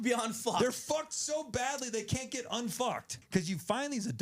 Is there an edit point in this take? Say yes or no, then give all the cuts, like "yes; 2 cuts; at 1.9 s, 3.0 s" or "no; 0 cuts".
yes; 1 cut; at 3.1 s